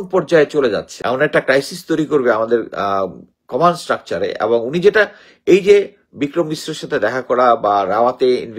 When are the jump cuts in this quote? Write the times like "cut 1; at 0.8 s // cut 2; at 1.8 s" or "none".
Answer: cut 1; at 0.9 s